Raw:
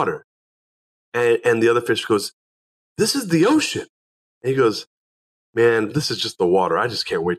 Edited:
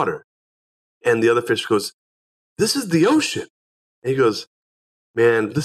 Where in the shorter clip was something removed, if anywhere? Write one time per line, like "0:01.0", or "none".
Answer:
0:01.0